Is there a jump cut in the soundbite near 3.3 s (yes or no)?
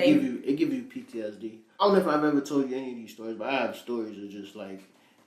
no